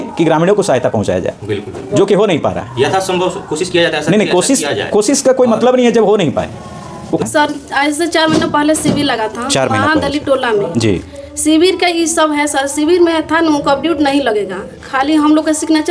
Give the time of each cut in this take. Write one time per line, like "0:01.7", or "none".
0:07.2

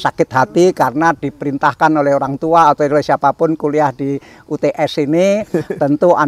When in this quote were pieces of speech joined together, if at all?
none

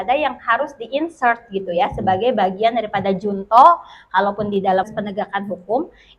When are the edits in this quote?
0:04.9

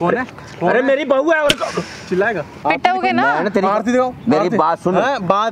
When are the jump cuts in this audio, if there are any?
0:02.6

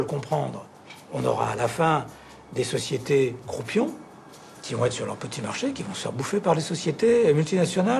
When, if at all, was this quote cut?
none

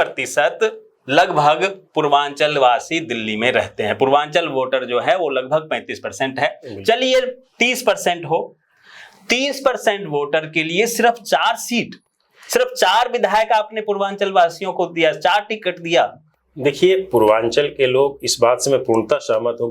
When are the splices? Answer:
none

